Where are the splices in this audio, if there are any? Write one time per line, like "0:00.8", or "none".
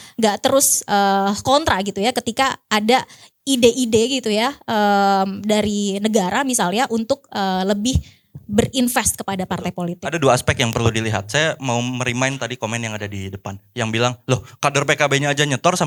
none